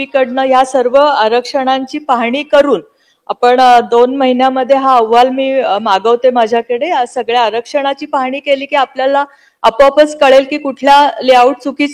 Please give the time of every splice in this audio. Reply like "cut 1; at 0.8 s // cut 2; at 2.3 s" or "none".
none